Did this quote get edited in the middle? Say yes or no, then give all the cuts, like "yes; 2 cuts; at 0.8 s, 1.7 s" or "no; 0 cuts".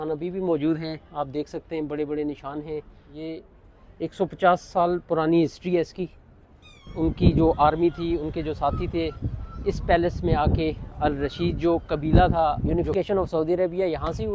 yes; 3 cuts; at 3.0 s, 6.8 s, 12.7 s